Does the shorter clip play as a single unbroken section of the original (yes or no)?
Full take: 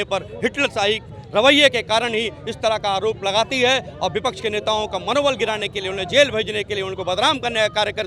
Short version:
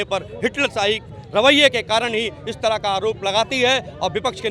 yes